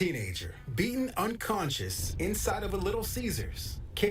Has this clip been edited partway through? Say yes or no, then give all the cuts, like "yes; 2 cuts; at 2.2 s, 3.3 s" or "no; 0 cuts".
yes; 1 cut; at 0.9 s